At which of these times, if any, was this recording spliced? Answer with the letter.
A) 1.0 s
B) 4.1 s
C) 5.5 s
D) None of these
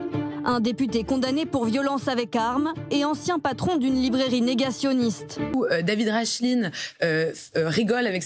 C